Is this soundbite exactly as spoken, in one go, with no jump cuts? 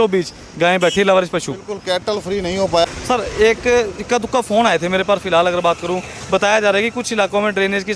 no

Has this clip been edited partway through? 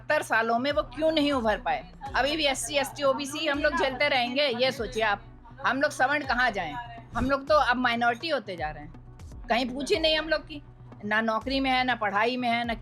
no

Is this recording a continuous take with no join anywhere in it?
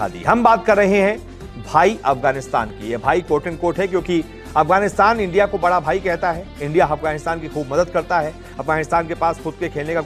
yes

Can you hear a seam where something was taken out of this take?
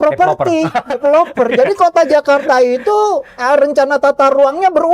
no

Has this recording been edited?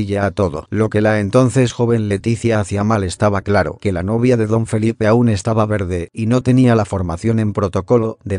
no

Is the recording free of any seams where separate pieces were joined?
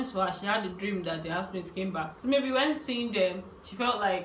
no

